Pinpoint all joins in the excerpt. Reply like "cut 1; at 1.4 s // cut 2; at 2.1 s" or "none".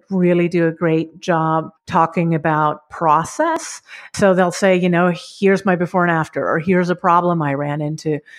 cut 1; at 1.8 s // cut 2; at 4.1 s